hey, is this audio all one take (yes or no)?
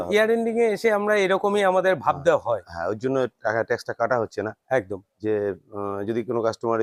yes